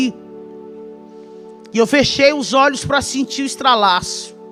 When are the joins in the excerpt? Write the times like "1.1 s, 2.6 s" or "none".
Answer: none